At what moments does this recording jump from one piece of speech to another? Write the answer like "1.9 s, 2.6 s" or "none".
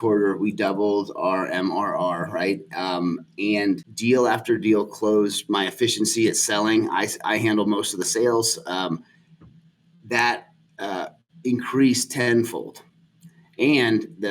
3.9 s